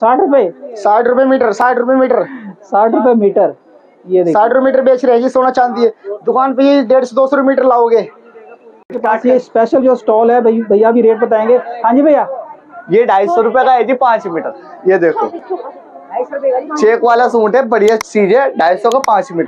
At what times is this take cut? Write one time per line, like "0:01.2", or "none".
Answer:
none